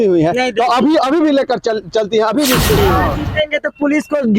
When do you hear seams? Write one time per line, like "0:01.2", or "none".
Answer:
0:02.8